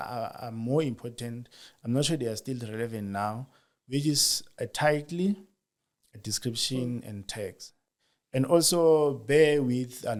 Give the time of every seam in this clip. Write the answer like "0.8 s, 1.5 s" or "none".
none

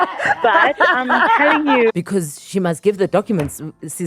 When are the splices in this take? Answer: 1.9 s

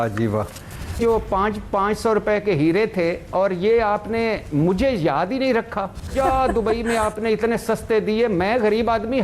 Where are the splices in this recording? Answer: 1.0 s, 6.1 s

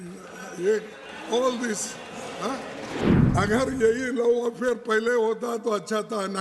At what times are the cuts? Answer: 3.1 s

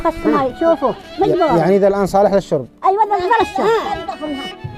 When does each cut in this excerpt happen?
1.0 s

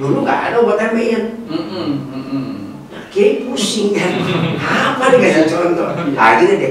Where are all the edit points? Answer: none

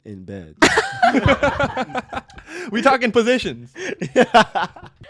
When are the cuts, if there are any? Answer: none

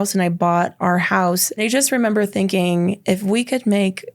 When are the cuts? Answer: 1.6 s, 3.0 s

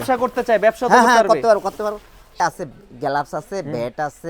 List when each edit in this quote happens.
2.4 s

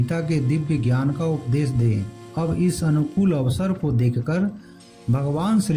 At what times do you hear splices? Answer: 2.3 s

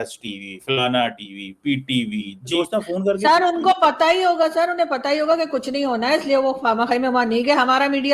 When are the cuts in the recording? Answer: 2.5 s

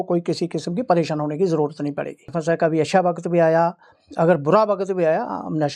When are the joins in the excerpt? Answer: 2.3 s

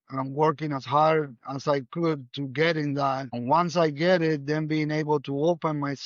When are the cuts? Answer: 3.3 s

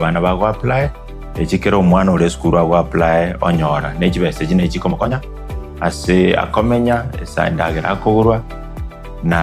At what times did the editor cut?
5.1 s

